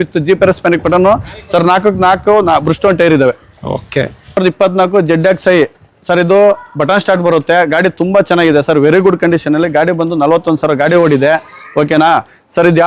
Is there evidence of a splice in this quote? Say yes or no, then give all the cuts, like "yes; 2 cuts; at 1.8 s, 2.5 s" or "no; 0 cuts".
yes; 1 cut; at 4.4 s